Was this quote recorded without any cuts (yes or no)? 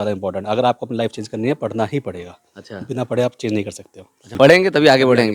no